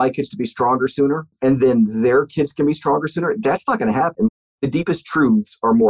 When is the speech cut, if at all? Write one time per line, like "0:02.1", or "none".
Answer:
0:04.3